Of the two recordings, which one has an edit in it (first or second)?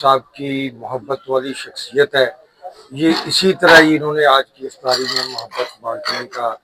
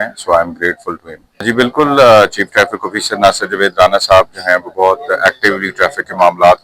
second